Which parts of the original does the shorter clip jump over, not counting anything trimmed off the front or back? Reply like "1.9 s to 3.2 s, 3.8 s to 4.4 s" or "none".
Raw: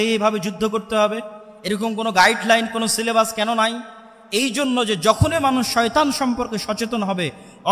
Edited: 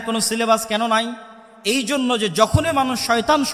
none